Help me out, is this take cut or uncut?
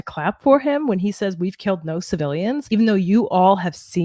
cut